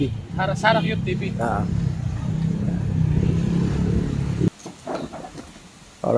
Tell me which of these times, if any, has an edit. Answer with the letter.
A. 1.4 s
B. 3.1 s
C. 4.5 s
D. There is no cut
C